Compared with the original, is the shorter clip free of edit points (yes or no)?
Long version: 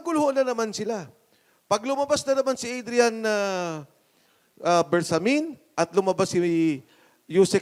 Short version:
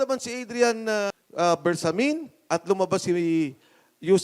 no